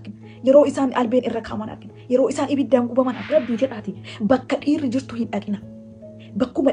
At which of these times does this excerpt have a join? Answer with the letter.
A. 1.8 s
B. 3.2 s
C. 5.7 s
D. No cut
B